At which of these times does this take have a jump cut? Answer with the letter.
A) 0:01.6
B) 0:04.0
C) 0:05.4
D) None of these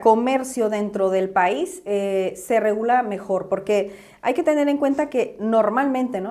D